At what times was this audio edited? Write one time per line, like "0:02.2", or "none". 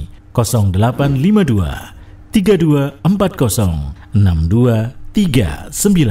0:03.9